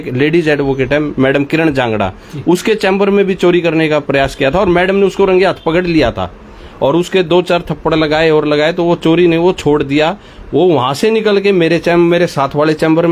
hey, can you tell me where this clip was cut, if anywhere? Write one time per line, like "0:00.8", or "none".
none